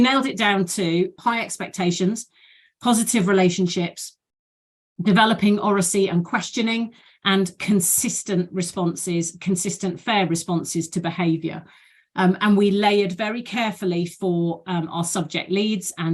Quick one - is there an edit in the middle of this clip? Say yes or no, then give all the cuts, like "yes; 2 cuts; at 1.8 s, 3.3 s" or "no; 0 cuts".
yes; 1 cut; at 1.1 s